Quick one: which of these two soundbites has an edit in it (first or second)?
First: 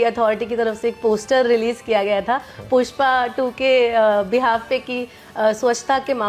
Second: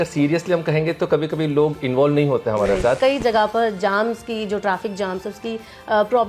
second